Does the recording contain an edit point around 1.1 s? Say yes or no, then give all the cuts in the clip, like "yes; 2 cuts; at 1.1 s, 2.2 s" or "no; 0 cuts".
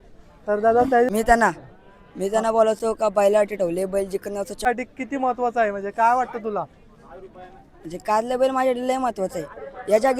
yes; 2 cuts; at 1.1 s, 4.7 s